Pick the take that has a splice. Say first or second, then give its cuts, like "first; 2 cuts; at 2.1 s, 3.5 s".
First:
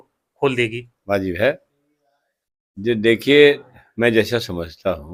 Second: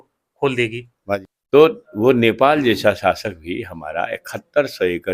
second; 1 cut; at 1.2 s